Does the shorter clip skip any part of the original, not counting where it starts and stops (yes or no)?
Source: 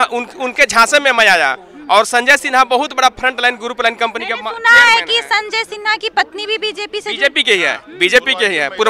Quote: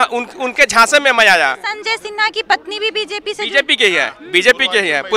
yes